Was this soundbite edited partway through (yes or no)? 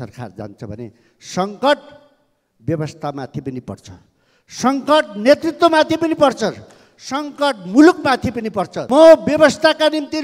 yes